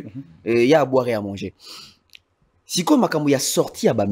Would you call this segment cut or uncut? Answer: uncut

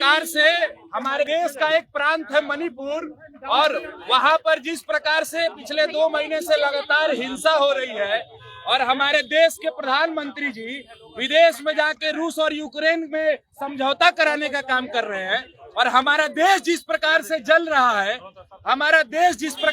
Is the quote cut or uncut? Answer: cut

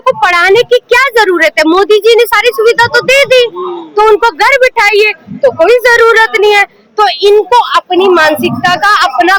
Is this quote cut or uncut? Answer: uncut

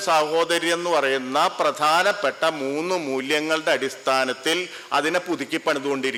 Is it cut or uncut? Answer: uncut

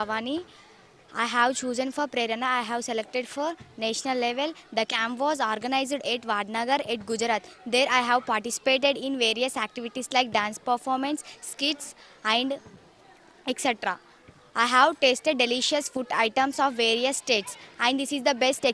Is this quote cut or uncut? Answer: uncut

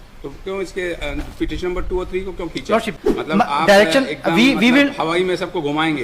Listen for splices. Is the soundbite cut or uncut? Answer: cut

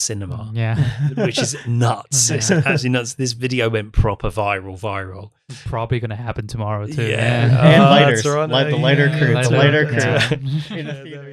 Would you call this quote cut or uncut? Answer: uncut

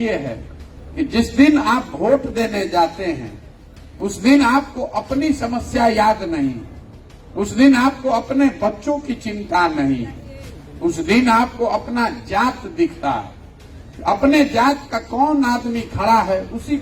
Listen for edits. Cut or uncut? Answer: uncut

